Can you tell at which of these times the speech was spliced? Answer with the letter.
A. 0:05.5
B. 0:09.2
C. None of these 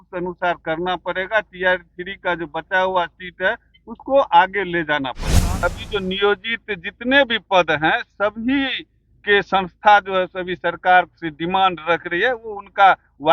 A